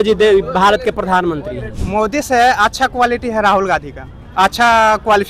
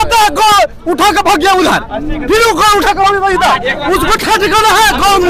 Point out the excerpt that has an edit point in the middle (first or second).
first